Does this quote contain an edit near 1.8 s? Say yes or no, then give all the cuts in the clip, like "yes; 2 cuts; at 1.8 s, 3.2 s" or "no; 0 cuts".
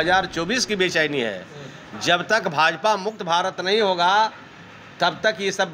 no; 1 cut; at 4.8 s